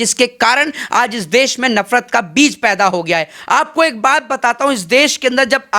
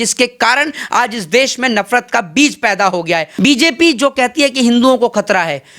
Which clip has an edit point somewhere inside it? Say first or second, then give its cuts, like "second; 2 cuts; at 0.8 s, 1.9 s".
second; 1 cut; at 3.3 s